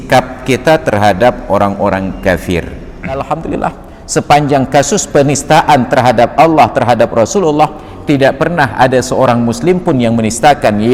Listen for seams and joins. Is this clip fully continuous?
no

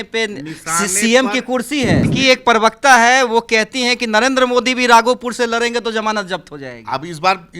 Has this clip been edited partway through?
yes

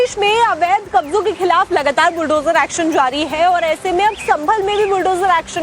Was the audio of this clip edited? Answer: yes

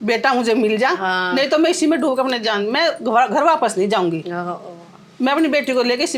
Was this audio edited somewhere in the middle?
no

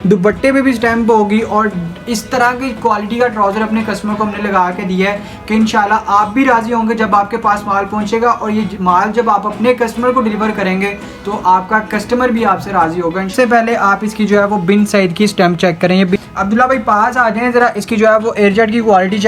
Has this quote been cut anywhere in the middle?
yes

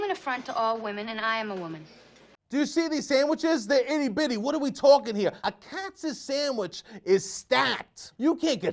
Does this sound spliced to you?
no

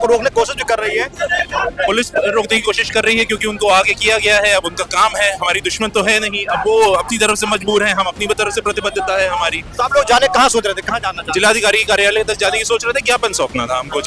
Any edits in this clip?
no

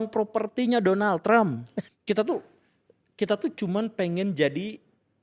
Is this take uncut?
no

